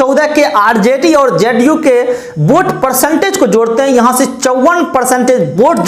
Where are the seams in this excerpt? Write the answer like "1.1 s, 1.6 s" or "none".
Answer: none